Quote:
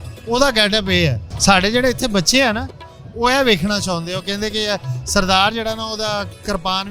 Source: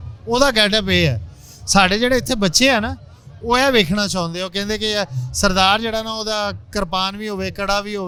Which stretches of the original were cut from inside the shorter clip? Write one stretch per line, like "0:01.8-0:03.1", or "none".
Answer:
0:01.3-0:01.5